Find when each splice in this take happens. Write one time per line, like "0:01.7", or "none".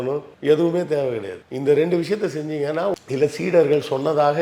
0:03.0